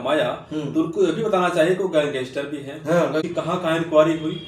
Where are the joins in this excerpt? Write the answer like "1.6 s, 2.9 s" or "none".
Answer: 3.2 s